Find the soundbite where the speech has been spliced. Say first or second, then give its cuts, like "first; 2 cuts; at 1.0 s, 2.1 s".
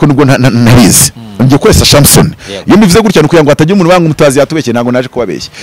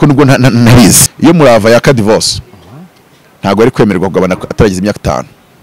second; 1 cut; at 1.1 s